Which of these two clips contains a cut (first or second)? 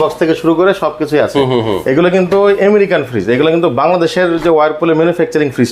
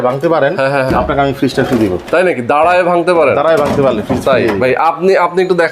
second